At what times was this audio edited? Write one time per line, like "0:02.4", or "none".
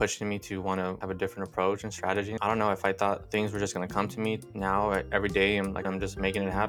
0:01.0
0:02.3
0:03.2
0:04.4
0:05.8